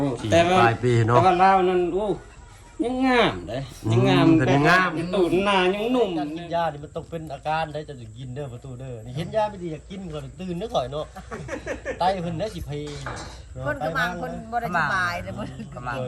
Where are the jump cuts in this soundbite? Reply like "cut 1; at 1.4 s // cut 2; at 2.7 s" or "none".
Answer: cut 1; at 6.3 s